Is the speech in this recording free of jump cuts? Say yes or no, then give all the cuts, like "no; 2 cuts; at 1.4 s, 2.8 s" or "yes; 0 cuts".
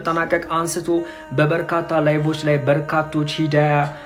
yes; 0 cuts